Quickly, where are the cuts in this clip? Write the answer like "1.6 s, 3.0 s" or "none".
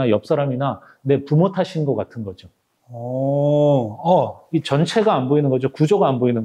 4.4 s